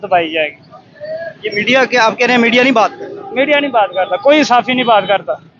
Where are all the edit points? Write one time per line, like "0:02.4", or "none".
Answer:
none